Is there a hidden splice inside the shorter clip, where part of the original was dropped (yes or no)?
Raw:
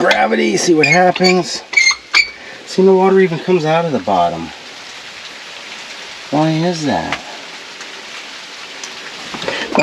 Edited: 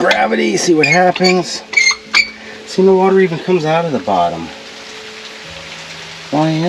no